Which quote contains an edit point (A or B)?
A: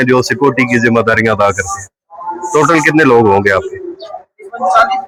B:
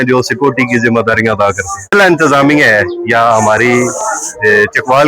B